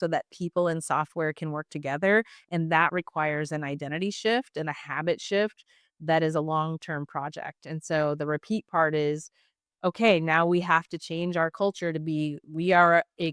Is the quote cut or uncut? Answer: uncut